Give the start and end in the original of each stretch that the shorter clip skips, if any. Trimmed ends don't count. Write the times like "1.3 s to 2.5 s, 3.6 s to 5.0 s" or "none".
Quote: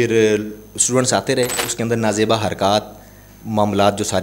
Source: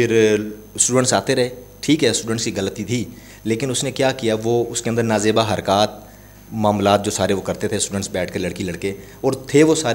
1.7 s to 4.8 s